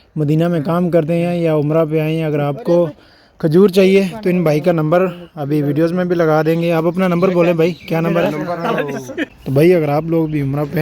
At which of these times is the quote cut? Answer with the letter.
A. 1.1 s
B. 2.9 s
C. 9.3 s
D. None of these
C